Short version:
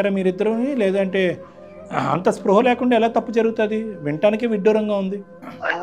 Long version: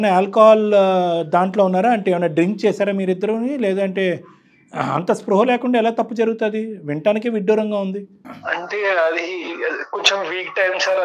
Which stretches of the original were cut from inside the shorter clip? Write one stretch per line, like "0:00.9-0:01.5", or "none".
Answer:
none